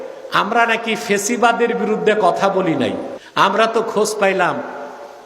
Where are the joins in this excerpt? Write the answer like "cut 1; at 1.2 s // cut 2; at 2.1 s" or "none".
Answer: cut 1; at 3.2 s